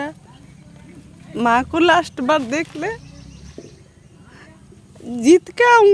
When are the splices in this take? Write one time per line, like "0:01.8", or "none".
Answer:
none